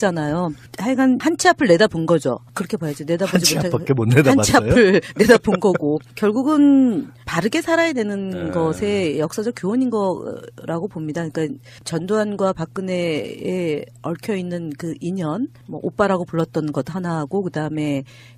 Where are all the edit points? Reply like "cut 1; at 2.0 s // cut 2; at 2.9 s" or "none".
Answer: cut 1; at 7.5 s

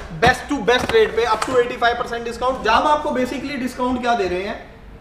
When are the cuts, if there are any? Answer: cut 1; at 2.7 s

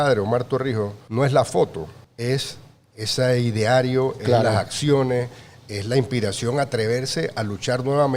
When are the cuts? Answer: cut 1; at 1.0 s // cut 2; at 2.0 s

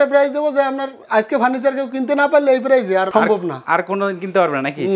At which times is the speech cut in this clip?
none

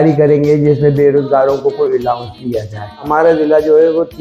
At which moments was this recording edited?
cut 1; at 3.1 s

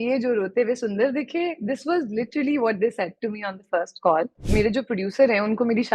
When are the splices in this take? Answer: cut 1; at 4.4 s

